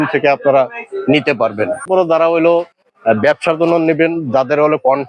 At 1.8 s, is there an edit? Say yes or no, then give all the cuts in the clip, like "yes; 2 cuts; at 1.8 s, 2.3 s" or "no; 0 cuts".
yes; 1 cut; at 1.8 s